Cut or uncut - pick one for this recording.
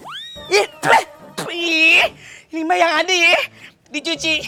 uncut